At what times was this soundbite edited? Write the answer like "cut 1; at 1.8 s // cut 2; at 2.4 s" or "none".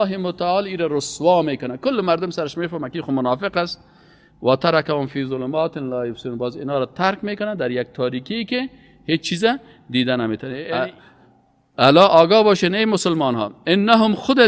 cut 1; at 10.5 s

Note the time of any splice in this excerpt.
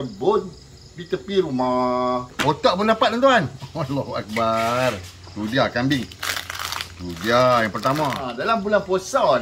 cut 1; at 2.3 s // cut 2; at 8.3 s

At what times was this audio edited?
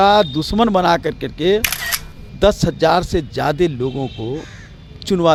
none

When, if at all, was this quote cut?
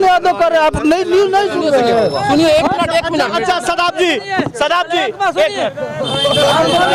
none

